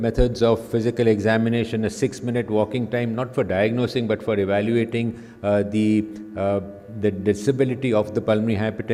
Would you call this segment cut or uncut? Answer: uncut